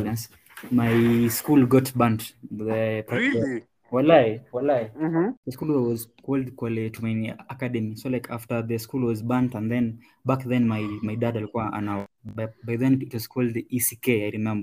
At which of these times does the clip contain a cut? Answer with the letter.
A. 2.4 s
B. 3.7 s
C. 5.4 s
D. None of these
C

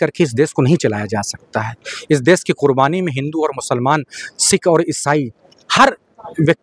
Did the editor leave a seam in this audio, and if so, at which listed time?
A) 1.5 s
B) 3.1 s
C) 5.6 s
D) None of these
D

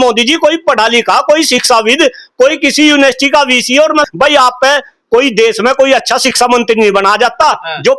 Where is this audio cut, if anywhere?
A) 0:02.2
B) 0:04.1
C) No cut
B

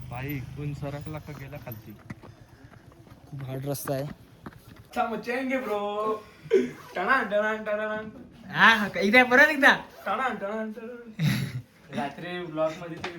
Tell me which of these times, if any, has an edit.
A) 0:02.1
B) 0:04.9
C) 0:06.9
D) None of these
B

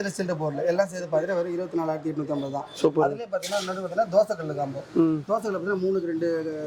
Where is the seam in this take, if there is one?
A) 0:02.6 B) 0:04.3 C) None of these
C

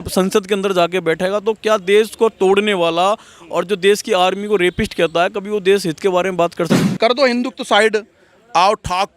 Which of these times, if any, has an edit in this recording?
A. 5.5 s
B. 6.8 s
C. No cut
B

